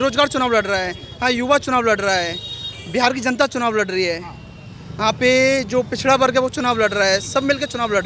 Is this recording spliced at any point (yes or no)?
no